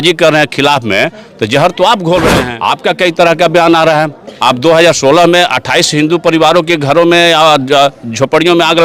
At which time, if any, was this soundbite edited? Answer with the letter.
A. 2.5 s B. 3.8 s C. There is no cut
A